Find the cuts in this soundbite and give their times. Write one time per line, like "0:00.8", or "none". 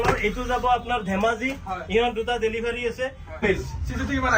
0:03.4